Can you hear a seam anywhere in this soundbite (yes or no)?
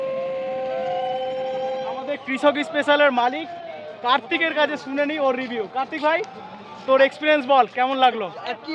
yes